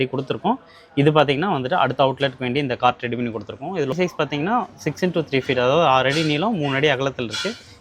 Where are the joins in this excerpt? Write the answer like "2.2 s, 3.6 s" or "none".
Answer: 3.9 s